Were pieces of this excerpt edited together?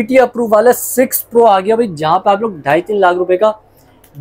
no; 0 cuts

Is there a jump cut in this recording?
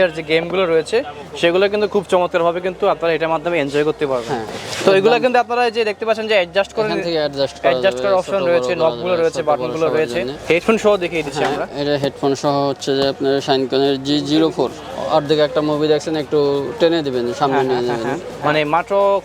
yes; 3 cuts; at 10.4 s, 14.8 s, 18.3 s

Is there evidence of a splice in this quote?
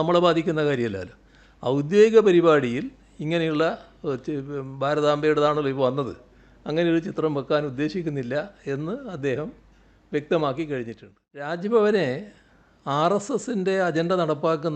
yes; 1 cut; at 11.5 s

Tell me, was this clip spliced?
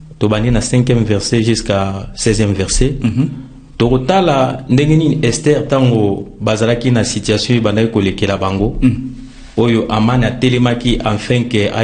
no; 0 cuts

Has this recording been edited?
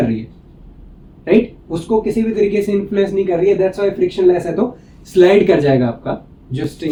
no; 0 cuts

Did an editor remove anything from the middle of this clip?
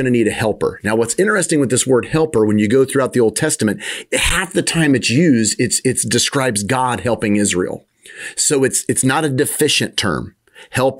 no; 0 cuts

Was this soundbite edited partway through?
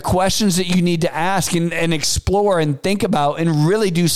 no; 0 cuts

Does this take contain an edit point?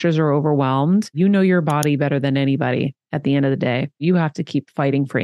yes; 2 cuts; at 1.1 s, 4.0 s

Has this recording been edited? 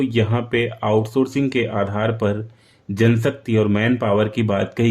no; 0 cuts

